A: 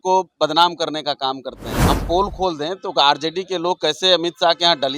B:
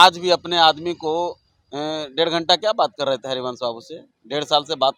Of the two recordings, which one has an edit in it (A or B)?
A